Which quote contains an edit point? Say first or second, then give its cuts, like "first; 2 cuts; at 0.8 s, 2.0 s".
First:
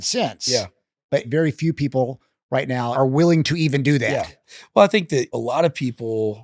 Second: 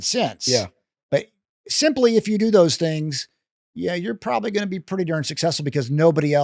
first; 3 cuts; at 1.3 s, 2.9 s, 5.3 s